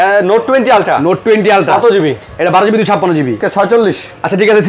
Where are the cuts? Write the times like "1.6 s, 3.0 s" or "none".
3.4 s

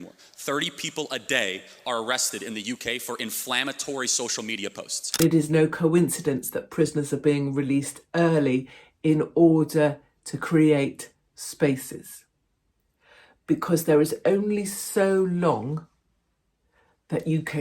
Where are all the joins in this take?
5.2 s

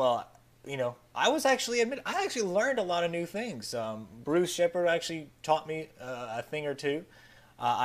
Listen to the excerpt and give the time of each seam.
1.2 s

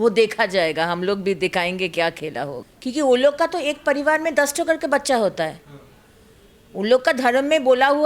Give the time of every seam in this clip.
2.6 s

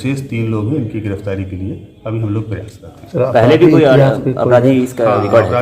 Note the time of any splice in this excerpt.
none

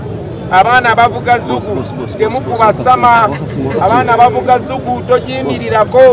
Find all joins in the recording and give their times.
none

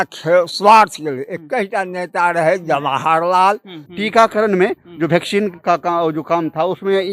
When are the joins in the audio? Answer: 3.9 s

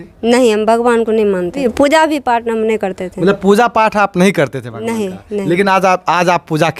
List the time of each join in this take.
1.7 s

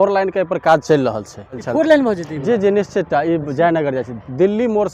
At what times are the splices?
1.6 s

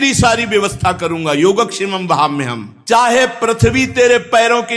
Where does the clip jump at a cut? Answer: 3.0 s

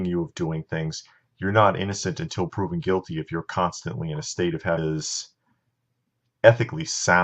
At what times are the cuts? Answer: none

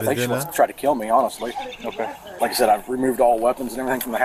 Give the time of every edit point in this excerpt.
none

